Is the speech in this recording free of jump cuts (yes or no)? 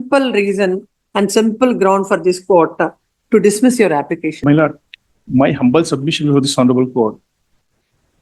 yes